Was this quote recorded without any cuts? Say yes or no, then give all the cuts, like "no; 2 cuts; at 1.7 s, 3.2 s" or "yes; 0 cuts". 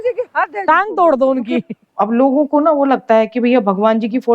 no; 1 cut; at 1.6 s